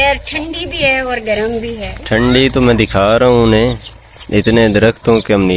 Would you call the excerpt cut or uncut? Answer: uncut